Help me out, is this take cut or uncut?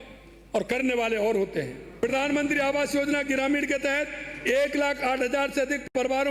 cut